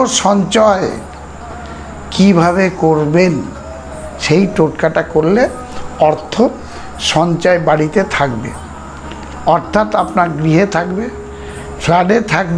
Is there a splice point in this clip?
no; 0 cuts

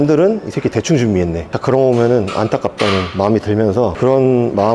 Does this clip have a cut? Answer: yes; 1 cut; at 1.5 s

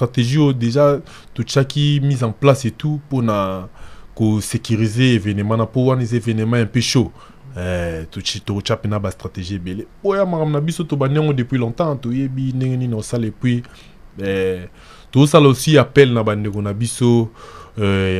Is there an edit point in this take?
no; 0 cuts

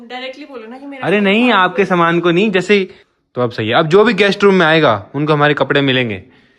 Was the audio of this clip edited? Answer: yes; 1 cut; at 3.0 s

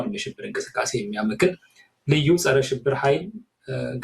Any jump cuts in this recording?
no; 0 cuts

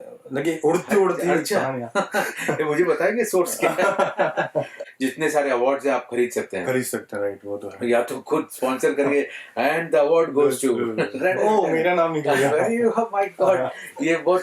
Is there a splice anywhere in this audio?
yes; 1 cut; at 4.8 s

